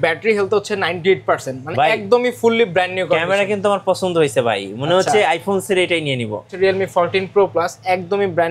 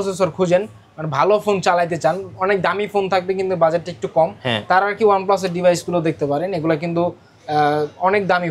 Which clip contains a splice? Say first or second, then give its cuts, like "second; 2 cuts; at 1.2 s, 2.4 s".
first; 1 cut; at 6.6 s